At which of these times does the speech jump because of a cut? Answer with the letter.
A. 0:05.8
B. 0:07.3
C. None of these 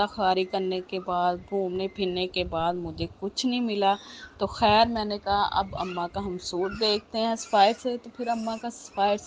C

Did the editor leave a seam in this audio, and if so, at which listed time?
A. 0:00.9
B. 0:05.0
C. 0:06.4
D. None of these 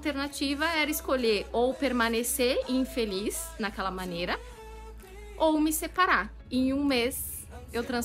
C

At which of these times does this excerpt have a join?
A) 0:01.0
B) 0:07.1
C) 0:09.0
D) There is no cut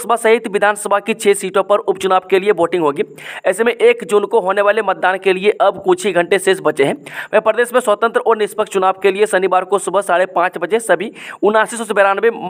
D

